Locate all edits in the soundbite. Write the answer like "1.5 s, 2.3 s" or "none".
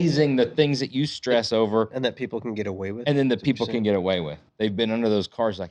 4.4 s